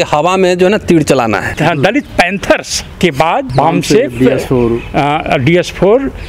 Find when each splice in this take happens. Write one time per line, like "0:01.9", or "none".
0:01.5
0:02.9